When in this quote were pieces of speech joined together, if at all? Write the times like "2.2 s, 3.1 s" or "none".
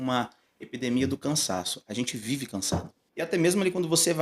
3.0 s